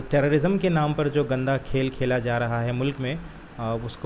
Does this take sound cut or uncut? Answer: uncut